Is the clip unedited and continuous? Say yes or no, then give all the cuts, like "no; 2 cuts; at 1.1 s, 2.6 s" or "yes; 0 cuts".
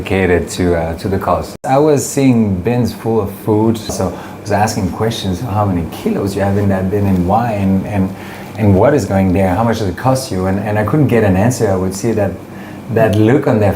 no; 2 cuts; at 1.6 s, 4.0 s